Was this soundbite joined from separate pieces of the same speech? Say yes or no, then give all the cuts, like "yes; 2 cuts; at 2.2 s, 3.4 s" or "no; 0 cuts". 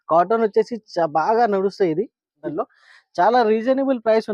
yes; 1 cut; at 2.4 s